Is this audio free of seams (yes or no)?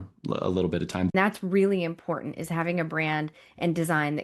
no